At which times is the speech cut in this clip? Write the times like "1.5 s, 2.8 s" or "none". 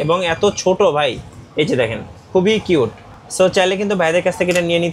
none

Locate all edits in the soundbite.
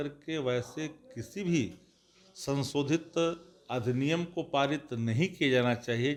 none

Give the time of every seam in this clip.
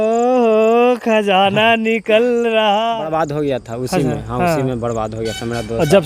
3.0 s

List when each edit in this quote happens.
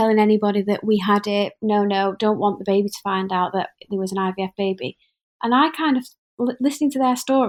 none

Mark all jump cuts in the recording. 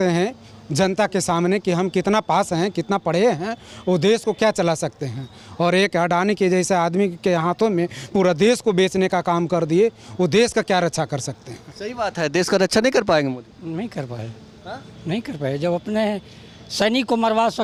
none

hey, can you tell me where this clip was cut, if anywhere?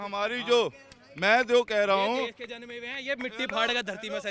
none

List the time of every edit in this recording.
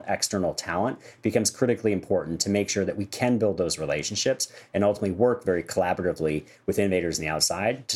none

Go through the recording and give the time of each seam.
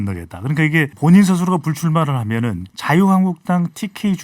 0.9 s, 2.7 s

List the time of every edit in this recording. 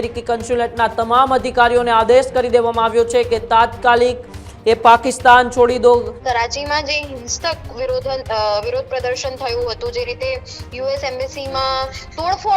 6.2 s

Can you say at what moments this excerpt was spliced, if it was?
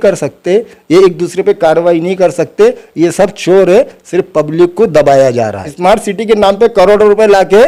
5.7 s

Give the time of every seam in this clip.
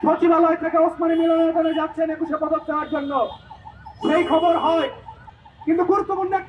none

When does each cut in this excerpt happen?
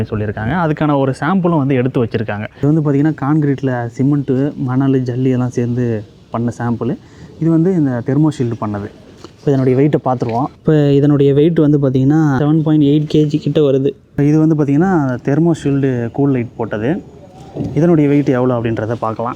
2.5 s, 12.4 s

